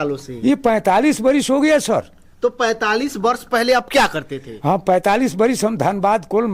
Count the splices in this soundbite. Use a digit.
0